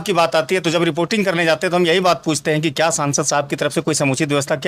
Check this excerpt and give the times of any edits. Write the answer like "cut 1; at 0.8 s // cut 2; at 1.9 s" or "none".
none